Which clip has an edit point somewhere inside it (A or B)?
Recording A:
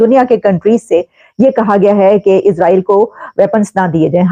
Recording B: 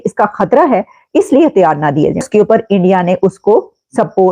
B